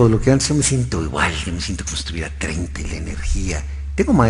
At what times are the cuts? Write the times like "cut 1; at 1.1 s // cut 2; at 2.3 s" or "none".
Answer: none